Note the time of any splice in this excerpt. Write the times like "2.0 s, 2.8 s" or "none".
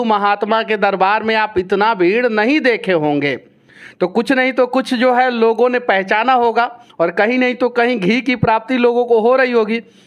none